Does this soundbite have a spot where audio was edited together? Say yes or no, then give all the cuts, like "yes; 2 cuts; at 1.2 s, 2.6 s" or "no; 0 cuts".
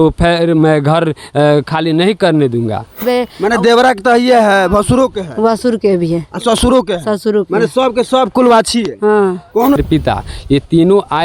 yes; 2 cuts; at 3.0 s, 9.8 s